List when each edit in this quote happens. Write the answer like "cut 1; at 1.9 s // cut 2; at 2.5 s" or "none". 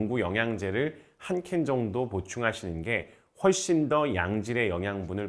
none